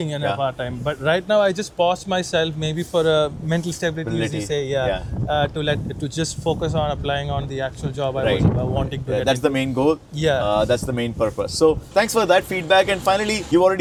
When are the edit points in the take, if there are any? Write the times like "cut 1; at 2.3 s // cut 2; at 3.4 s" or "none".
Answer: none